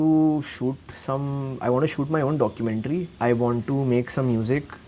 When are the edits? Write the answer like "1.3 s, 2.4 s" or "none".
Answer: 3.1 s